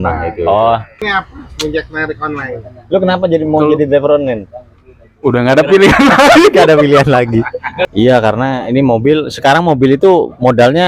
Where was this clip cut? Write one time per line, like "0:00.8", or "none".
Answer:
0:01.0
0:07.9